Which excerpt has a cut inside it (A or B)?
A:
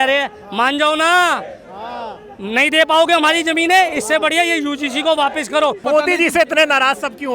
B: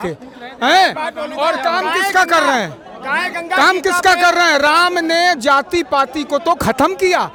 A